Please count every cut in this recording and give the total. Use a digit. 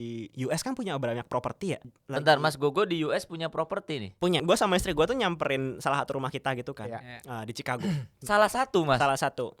2